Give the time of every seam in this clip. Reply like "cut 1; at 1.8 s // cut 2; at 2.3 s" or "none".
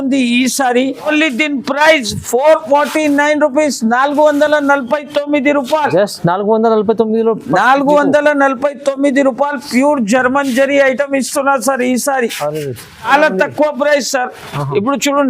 cut 1; at 1.1 s // cut 2; at 13.1 s